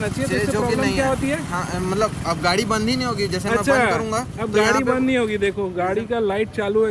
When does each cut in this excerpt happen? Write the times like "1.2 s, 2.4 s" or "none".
none